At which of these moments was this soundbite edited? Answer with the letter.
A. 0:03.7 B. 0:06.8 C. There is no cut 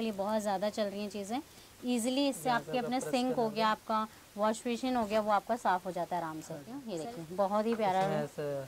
B